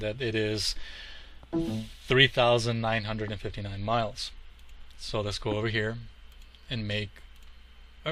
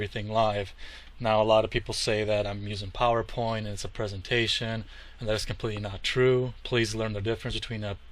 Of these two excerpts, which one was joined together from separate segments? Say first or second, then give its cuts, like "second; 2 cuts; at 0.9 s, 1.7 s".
second; 1 cut; at 5.9 s